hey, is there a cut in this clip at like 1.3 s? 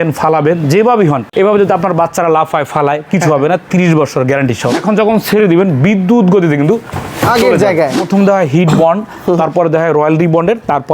yes; 3 cuts; at 1.3 s, 4.8 s, 8.0 s

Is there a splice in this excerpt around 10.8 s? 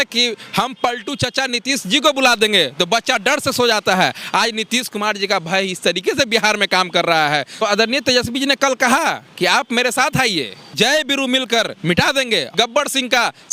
yes; 3 cuts; at 7.6 s, 10.8 s, 12.5 s

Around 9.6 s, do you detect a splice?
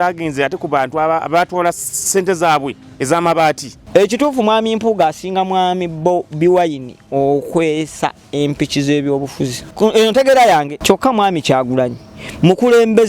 yes; 3 cuts; at 3.7 s, 9.6 s, 10.7 s

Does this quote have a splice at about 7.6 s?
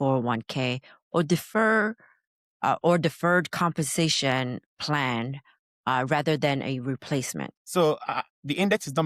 yes; 1 cut; at 7.6 s

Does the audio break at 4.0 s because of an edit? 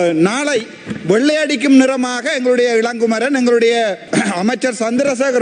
yes; 1 cut; at 4.0 s

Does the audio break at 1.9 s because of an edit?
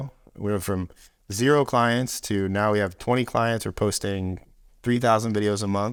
no; 0 cuts

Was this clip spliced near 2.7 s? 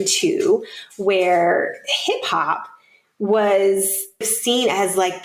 no; 1 cut; at 4.3 s

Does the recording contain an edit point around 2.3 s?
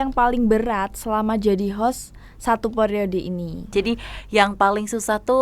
no; 1 cut; at 3.6 s

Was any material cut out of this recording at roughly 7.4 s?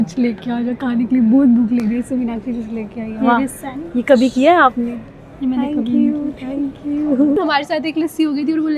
yes; 1 cut; at 7.4 s

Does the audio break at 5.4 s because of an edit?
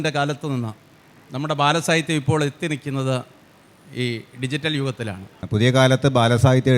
yes; 1 cut; at 5.4 s

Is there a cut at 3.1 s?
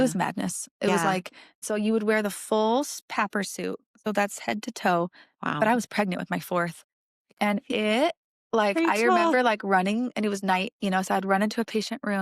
no; 1 cut; at 1.6 s

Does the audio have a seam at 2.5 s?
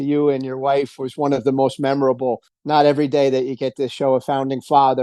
yes; 1 cut; at 2.5 s

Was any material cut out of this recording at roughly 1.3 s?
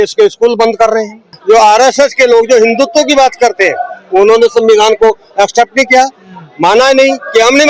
yes; 1 cut; at 1.3 s

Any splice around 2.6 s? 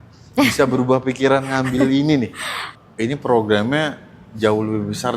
yes; 1 cut; at 2.6 s

